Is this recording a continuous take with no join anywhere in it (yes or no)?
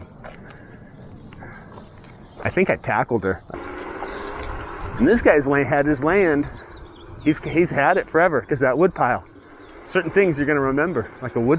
no